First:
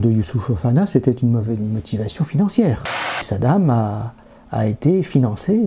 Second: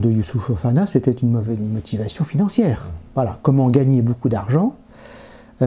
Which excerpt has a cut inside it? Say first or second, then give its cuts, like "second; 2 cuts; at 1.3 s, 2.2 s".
first; 1 cut; at 3.2 s